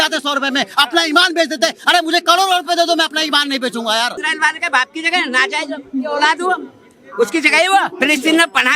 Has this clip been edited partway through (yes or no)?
yes